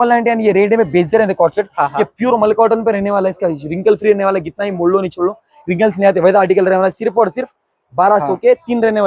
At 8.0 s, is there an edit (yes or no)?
no